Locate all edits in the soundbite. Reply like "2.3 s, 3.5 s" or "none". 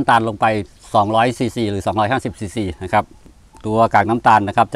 none